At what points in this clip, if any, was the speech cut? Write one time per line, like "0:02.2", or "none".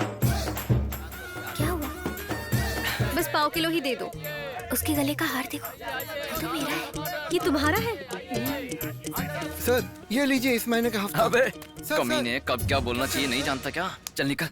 0:01.0
0:03.0
0:09.5

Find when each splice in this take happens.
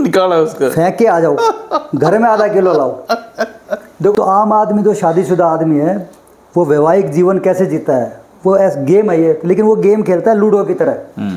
0:04.1

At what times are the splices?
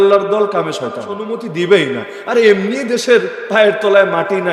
0:01.4

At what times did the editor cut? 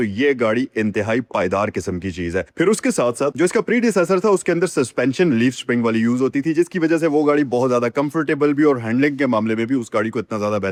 none

